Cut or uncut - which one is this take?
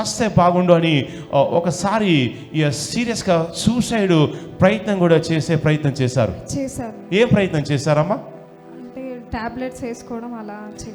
uncut